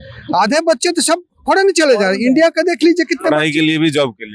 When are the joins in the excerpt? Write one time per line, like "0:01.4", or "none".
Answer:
none